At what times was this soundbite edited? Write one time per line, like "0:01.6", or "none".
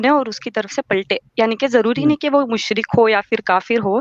none